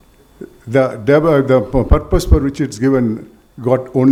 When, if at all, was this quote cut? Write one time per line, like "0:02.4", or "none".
none